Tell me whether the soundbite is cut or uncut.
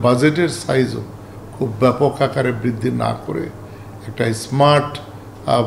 uncut